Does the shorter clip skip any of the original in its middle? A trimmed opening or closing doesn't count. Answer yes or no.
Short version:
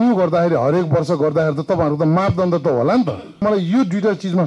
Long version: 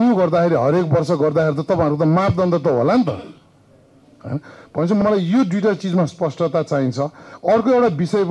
yes